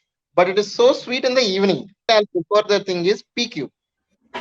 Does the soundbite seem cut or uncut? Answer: cut